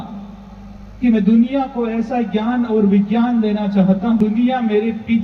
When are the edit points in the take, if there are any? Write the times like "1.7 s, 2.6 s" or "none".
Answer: 4.2 s